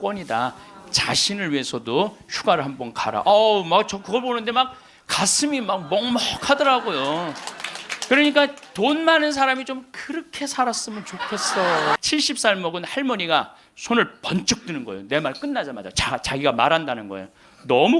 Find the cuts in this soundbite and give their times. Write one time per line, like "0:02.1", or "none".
0:12.0